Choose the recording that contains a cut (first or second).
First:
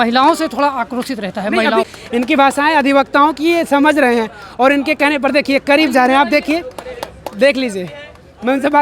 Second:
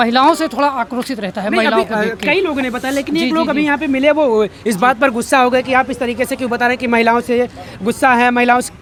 first